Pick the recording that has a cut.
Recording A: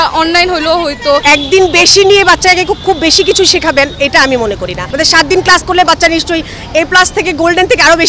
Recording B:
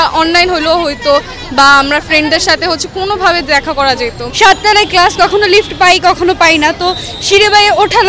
A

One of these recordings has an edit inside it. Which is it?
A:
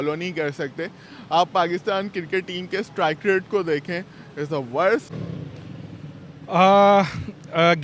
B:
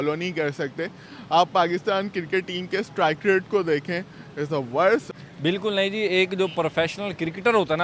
B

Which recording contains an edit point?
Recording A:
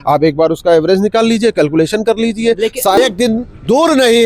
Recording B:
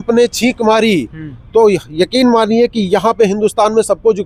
A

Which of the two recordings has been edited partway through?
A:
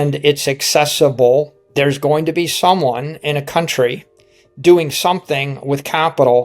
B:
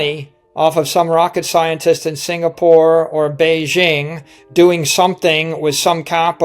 A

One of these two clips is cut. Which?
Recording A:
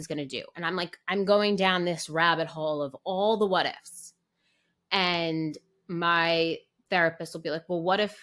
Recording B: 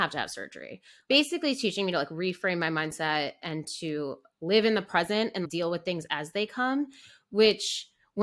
B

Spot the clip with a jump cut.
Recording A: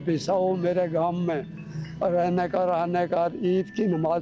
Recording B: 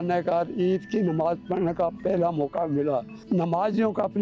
B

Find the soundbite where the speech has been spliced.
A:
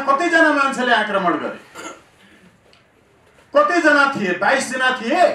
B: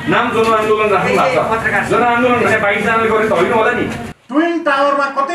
B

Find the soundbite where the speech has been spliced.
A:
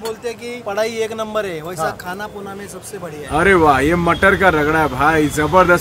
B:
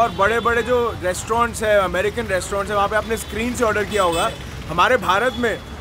A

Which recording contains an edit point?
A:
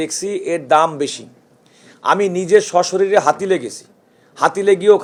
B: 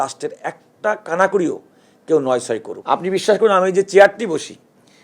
B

